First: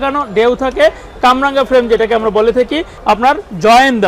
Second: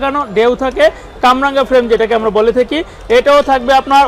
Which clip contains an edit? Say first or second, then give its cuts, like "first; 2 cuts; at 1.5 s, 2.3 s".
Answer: first; 1 cut; at 2.9 s